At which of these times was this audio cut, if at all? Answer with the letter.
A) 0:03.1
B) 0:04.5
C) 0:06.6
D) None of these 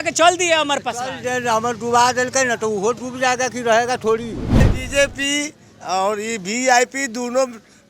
B